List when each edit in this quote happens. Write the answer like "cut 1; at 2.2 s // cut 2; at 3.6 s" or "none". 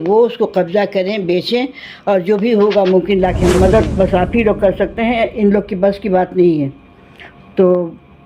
cut 1; at 3.6 s